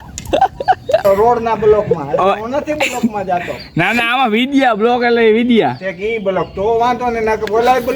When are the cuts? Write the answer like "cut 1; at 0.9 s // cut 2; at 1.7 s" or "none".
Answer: cut 1; at 1.0 s